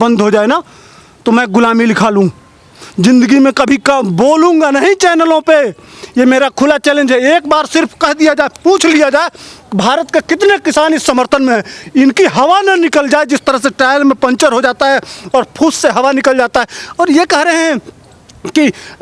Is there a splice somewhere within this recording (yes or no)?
no